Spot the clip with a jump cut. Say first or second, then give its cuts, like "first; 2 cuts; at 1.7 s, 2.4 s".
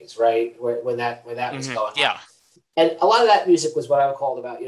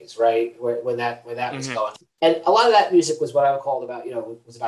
second; 1 cut; at 1.9 s